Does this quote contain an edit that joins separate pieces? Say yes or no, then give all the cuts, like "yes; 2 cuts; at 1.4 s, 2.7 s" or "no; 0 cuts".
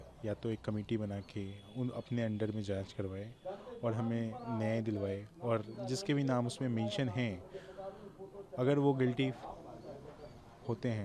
no; 0 cuts